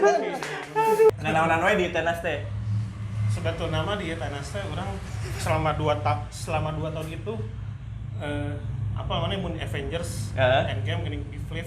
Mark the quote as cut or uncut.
cut